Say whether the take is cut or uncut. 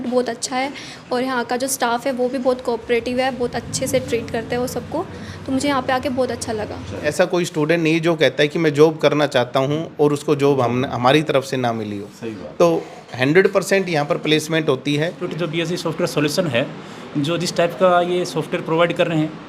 cut